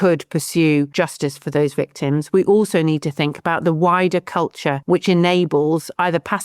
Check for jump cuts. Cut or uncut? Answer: cut